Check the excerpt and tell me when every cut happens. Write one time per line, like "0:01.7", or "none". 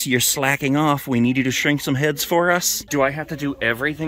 none